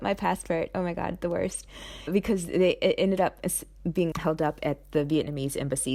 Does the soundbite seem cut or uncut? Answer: uncut